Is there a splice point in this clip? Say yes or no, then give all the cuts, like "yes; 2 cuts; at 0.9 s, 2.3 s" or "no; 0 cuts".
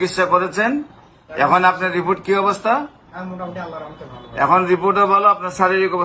no; 0 cuts